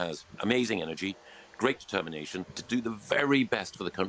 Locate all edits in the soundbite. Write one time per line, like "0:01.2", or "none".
0:02.6